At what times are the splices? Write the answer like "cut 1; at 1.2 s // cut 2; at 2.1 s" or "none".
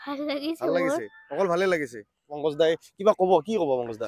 cut 1; at 2.3 s